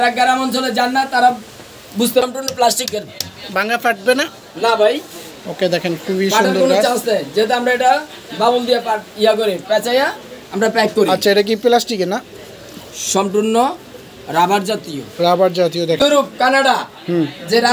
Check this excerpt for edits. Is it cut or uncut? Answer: cut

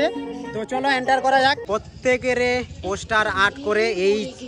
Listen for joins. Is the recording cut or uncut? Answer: cut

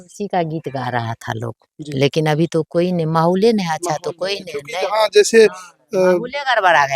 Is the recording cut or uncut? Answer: uncut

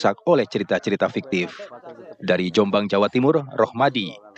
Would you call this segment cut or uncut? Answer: uncut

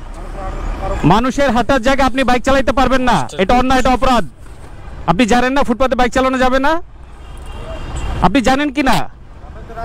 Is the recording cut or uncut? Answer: uncut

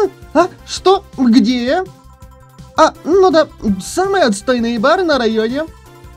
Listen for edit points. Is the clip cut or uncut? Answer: uncut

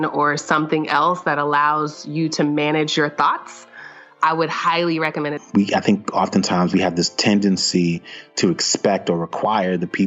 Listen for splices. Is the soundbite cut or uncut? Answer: cut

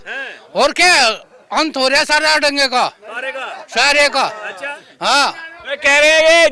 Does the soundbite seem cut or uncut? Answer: uncut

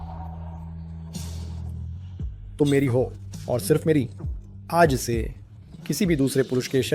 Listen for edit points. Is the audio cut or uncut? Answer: uncut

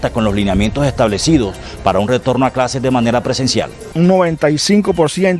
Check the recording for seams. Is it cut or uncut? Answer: cut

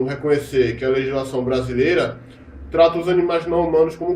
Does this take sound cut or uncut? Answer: cut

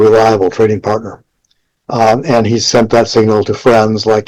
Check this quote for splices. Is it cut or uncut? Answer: uncut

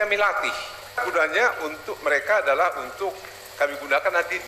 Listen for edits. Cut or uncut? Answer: cut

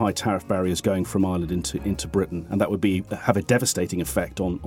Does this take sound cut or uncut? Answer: uncut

